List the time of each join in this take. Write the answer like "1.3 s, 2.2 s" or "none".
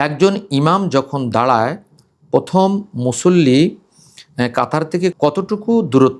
5.1 s